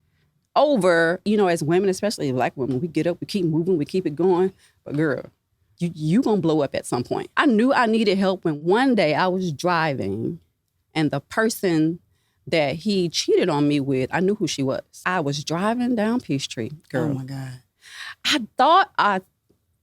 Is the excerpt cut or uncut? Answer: cut